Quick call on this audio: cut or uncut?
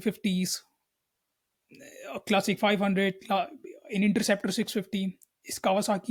uncut